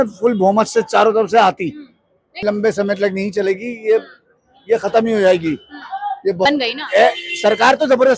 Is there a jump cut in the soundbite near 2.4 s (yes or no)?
yes